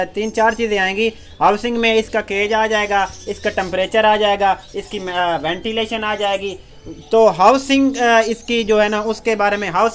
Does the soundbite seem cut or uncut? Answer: uncut